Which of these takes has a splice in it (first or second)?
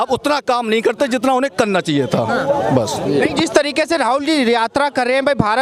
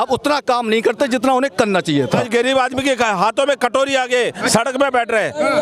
second